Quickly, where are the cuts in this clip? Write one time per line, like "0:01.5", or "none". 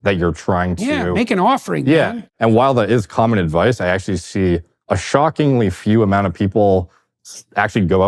0:02.1

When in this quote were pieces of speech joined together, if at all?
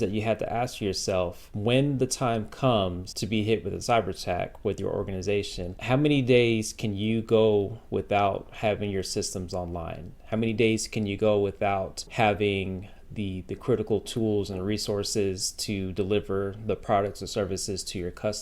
0:01.4
0:03.1
0:05.7
0:12.0

